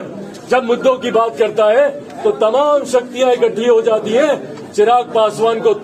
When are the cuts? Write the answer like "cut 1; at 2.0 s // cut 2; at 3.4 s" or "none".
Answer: none